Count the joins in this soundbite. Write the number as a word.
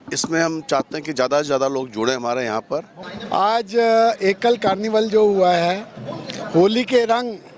one